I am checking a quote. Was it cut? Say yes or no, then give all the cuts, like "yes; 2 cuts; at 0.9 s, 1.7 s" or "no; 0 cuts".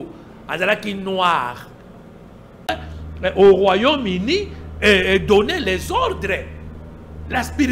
yes; 1 cut; at 2.7 s